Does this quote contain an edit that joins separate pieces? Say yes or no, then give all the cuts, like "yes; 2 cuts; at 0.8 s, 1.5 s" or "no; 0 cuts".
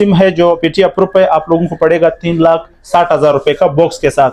no; 0 cuts